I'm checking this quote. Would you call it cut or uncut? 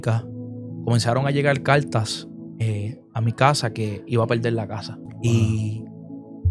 cut